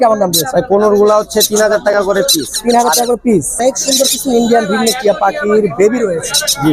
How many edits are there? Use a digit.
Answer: 1